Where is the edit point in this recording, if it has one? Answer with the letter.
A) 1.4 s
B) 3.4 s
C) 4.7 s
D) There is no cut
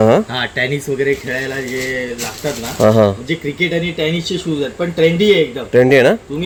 D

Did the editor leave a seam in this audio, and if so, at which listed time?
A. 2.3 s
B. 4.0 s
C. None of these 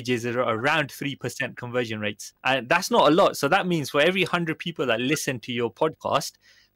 A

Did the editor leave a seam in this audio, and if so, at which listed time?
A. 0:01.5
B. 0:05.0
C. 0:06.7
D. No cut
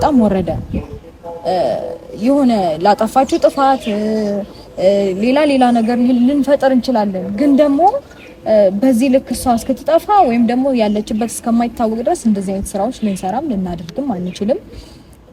D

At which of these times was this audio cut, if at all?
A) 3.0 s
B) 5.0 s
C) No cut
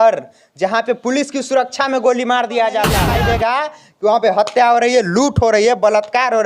A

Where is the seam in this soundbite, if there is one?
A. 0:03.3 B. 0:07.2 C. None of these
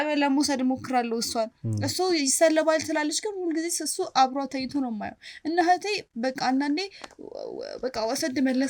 C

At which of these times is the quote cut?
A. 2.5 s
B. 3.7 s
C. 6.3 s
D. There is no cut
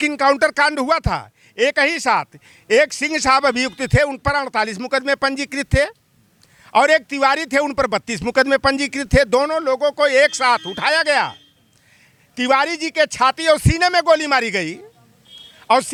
D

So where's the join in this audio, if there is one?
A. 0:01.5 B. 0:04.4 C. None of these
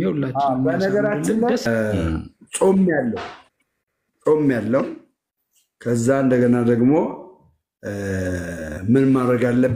A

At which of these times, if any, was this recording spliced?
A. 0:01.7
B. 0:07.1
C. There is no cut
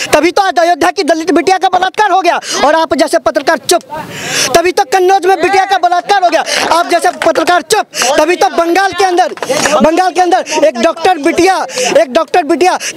B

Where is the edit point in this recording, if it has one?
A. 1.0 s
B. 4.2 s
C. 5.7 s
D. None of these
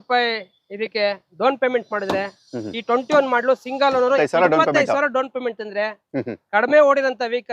B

